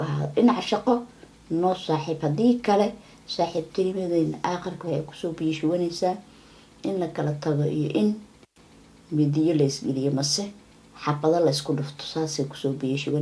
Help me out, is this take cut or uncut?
uncut